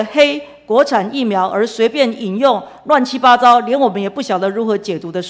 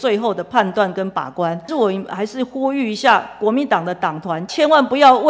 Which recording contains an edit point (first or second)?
second